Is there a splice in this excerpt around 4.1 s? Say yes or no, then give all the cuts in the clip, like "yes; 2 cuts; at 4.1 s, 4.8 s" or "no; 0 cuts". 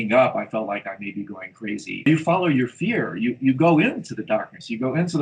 no; 1 cut; at 1.9 s